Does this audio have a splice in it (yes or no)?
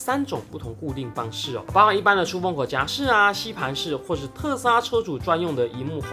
no